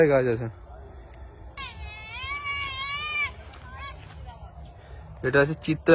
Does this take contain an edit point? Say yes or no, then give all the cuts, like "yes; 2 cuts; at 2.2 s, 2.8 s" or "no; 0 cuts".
yes; 1 cut; at 1.5 s